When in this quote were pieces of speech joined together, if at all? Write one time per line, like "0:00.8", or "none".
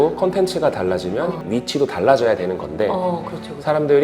0:01.4